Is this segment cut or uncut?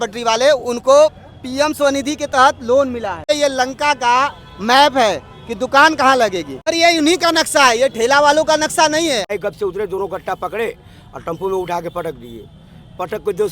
cut